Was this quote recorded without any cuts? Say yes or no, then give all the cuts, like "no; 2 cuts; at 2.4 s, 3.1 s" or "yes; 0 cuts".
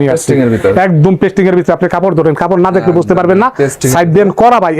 yes; 0 cuts